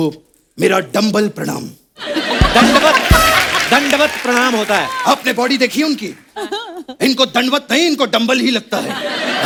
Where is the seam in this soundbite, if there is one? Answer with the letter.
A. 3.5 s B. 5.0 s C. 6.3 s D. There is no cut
D